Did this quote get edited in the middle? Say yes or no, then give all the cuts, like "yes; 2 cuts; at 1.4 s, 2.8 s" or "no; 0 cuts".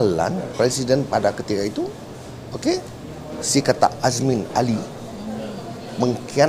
no; 0 cuts